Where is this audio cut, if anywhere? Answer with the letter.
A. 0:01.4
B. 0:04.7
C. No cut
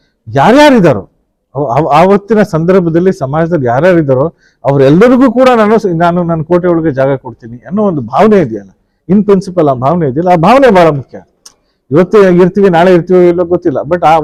C